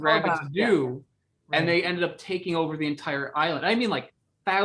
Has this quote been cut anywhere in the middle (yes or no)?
no